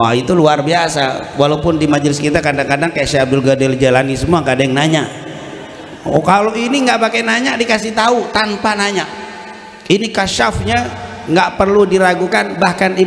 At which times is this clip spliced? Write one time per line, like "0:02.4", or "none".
none